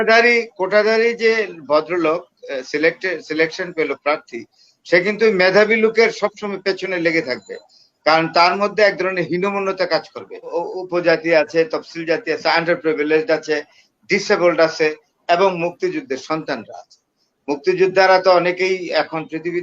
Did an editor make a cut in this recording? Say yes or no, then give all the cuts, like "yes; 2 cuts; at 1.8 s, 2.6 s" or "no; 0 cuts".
yes; 1 cut; at 10.6 s